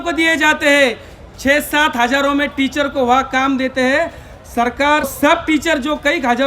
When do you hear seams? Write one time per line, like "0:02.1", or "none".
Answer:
0:05.1